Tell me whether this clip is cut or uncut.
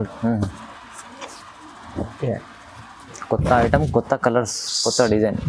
cut